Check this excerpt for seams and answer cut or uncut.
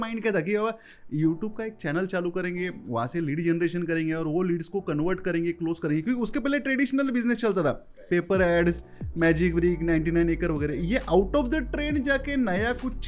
uncut